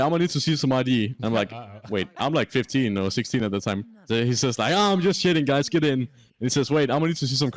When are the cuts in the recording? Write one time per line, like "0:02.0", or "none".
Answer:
0:01.2